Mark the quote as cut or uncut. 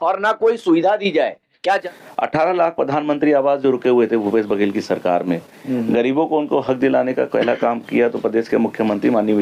cut